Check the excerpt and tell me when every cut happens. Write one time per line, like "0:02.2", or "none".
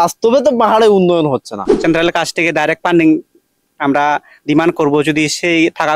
0:01.7